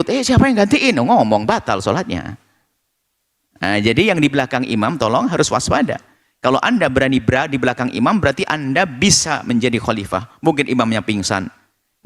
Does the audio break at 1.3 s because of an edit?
no; 0 cuts

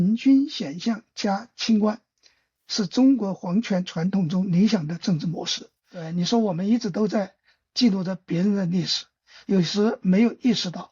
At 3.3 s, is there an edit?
no; 1 cut; at 6.1 s

